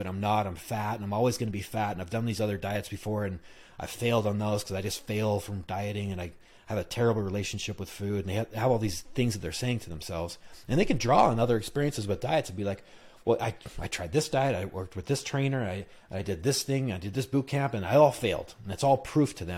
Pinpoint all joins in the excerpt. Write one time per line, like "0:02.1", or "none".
none